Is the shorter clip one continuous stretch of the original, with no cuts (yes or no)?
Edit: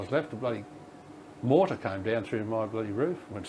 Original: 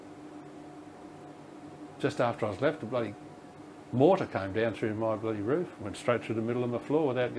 yes